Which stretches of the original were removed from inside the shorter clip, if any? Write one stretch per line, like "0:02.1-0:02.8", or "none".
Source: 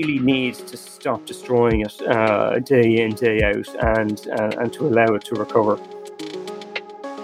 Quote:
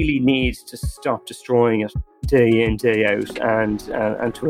0:02.1-0:02.5

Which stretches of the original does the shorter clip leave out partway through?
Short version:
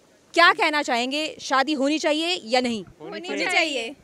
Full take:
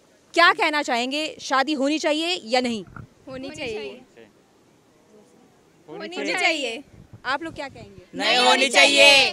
0:03.0-0:05.8

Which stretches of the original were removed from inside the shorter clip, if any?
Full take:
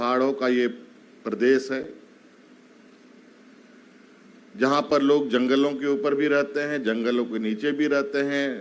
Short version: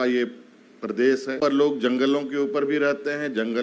0:01.8-0:04.9

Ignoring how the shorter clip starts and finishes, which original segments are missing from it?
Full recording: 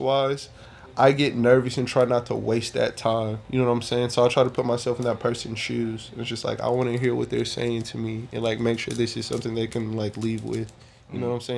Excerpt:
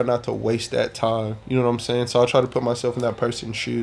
none

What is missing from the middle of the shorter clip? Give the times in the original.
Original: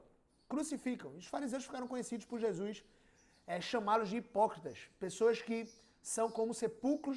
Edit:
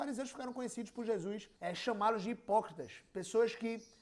0:02.8-0:03.4

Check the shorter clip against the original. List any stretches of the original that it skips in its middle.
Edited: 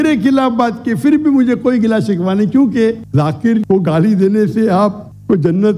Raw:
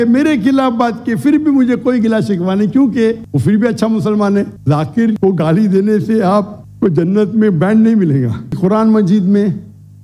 0:03.2-0:04.5

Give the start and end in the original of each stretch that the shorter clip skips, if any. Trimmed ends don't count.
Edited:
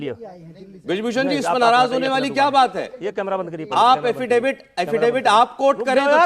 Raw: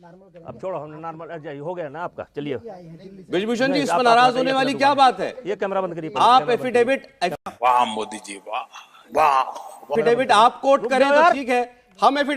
0:07.3-0:09.9

